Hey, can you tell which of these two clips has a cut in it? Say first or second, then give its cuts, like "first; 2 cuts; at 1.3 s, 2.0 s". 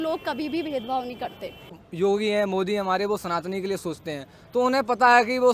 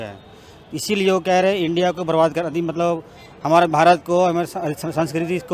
first; 1 cut; at 1.8 s